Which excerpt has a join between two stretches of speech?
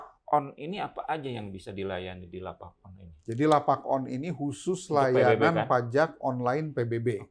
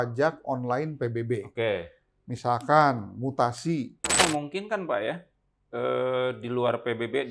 second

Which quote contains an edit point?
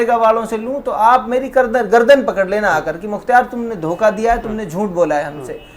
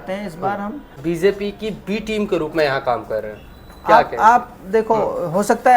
second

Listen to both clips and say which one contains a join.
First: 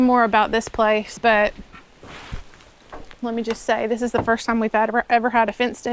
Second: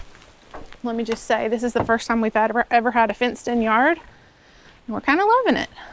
first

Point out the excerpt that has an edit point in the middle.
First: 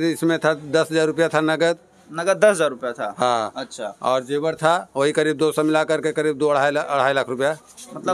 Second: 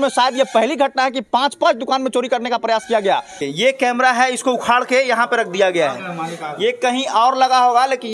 second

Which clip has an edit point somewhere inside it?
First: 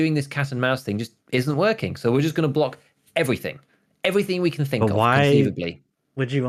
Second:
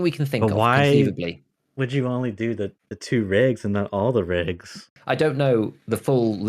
second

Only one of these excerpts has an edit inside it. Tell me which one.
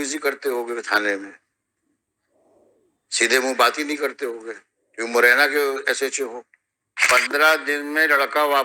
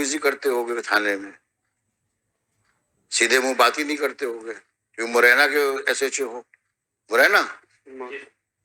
first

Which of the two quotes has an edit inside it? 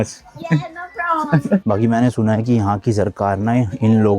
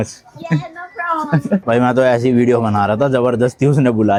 first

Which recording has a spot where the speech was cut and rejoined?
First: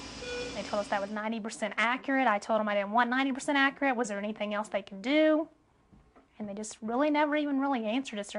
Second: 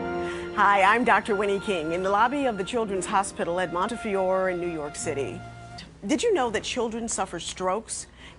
second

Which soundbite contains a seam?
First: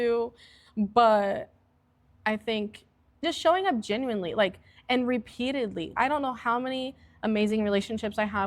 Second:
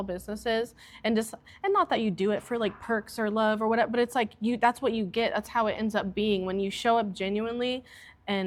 first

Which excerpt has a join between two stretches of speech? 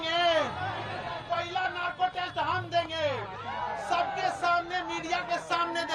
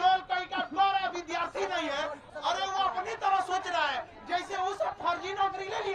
second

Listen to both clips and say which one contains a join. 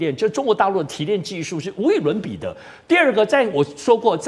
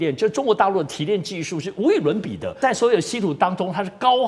second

